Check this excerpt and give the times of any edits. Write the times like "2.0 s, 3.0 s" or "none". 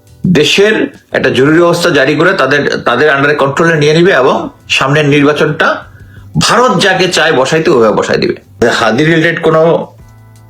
8.6 s